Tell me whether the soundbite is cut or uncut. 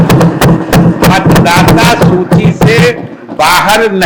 uncut